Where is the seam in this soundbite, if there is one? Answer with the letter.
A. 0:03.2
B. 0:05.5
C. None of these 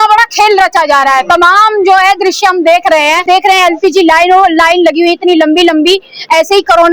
A